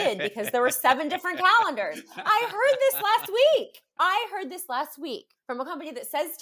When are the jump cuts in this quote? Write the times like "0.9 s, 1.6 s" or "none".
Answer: 3.8 s, 5.3 s